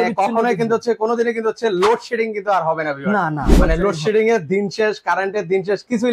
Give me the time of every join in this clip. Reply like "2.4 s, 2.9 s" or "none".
none